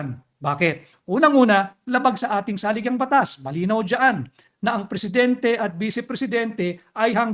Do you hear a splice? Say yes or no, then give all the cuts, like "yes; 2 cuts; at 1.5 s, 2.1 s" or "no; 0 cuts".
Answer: no; 0 cuts